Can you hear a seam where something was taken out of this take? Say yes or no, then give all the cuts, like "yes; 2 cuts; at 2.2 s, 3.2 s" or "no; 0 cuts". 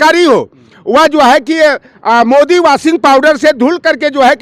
no; 0 cuts